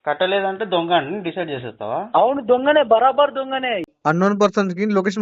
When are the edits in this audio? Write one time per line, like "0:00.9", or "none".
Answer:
0:03.9